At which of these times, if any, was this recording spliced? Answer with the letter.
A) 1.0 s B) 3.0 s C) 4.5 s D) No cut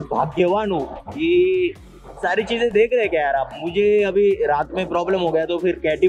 D